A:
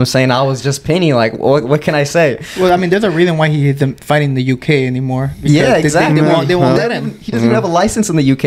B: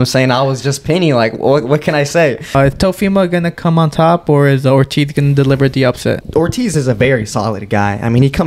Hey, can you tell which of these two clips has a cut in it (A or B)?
B